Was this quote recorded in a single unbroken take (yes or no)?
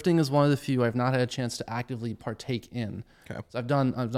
yes